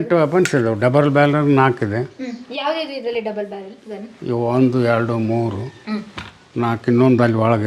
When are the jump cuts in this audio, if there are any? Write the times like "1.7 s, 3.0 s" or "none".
none